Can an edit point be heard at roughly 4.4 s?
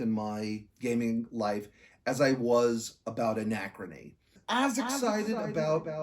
yes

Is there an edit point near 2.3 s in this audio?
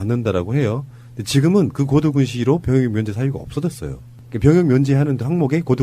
no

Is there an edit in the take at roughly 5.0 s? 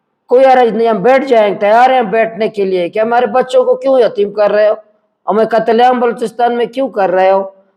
no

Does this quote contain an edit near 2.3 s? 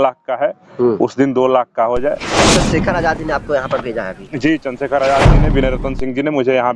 yes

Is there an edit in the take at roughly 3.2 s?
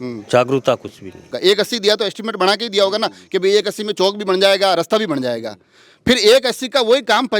no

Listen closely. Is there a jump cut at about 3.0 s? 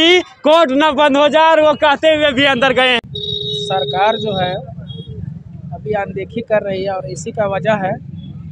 yes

